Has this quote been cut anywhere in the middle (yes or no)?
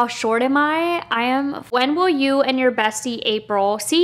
yes